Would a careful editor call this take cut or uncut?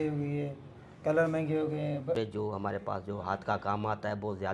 cut